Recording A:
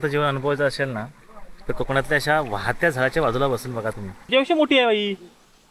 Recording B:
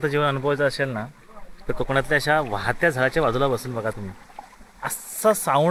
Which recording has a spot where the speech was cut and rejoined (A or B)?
A